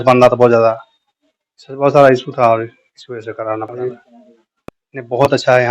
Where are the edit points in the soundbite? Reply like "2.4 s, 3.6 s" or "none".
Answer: 3.7 s